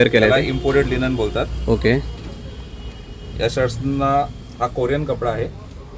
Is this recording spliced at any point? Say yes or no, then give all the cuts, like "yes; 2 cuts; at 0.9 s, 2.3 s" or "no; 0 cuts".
no; 0 cuts